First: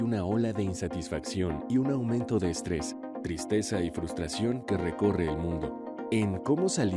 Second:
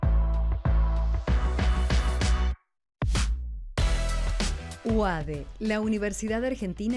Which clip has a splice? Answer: second; 1 cut; at 1.1 s

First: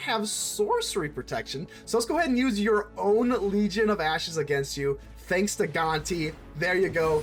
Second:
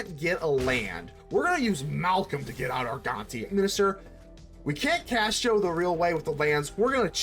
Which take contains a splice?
second; 1 cut; at 3.5 s

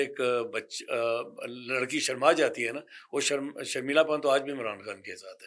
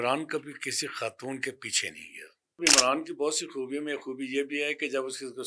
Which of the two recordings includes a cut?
second; 1 cut; at 2.6 s

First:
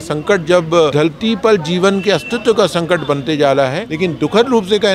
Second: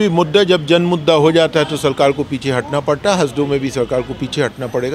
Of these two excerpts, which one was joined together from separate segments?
first; 2 cuts; at 0.9 s, 3.8 s

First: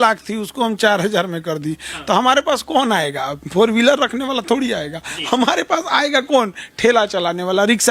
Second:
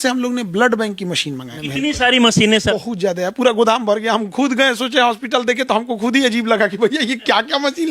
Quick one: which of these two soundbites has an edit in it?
second; 2 cuts; at 1.5 s, 2.7 s

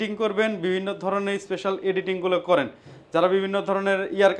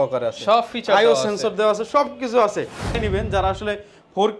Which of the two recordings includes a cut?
second; 1 cut; at 3.0 s

